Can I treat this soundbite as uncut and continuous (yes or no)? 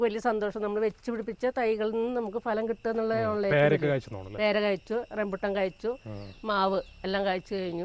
yes